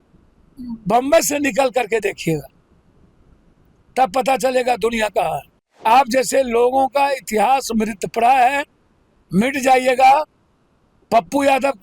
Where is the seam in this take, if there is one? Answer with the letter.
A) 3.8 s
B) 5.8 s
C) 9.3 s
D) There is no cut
B